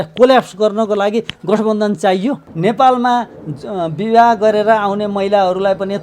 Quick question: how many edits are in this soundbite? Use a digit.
1